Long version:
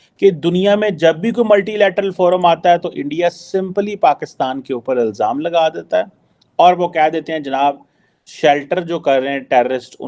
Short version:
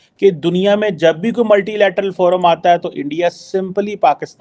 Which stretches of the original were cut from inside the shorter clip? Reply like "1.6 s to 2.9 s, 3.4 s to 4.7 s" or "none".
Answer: none